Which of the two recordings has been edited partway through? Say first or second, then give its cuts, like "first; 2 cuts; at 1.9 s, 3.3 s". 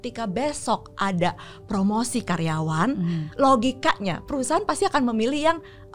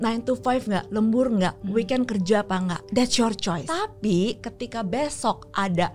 second; 2 cuts; at 2.8 s, 3.7 s